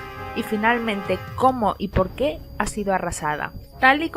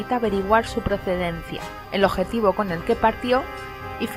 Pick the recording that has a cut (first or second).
first